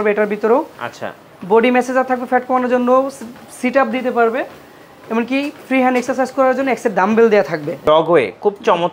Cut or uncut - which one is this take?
cut